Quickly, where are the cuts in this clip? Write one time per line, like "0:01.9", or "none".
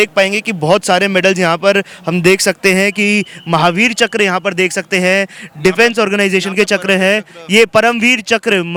none